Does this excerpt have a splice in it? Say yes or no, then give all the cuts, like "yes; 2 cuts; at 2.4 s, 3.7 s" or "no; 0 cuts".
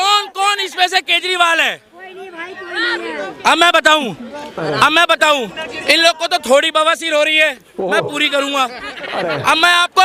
no; 0 cuts